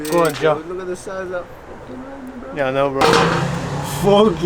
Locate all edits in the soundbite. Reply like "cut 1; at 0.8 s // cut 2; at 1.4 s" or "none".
cut 1; at 3.0 s

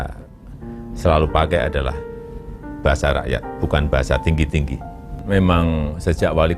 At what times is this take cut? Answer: cut 1; at 5.2 s

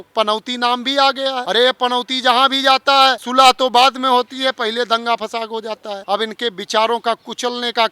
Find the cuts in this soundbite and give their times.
cut 1; at 1.4 s // cut 2; at 3.2 s // cut 3; at 6.0 s

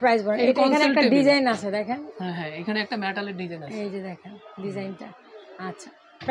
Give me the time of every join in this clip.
none

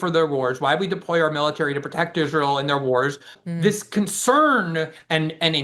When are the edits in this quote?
cut 1; at 3.3 s

